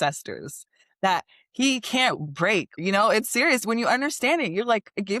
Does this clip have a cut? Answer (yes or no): yes